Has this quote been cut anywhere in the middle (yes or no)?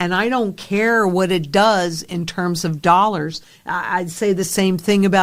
no